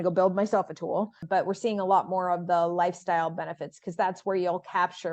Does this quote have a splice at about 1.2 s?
yes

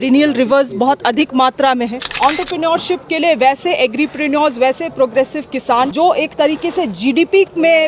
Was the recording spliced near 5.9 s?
yes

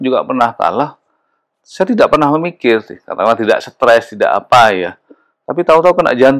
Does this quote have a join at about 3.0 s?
no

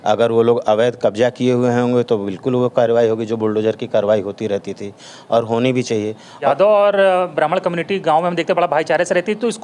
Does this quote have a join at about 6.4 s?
yes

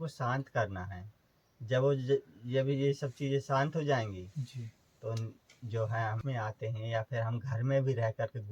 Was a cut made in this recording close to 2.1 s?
no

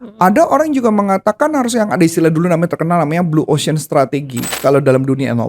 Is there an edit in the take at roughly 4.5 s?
yes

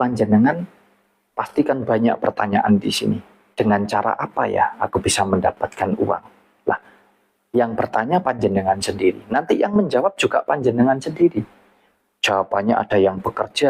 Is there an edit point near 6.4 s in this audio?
no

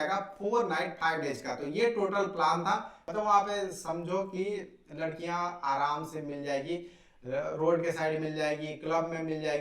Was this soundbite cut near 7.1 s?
no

